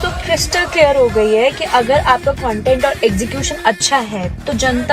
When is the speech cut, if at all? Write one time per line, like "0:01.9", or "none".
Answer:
none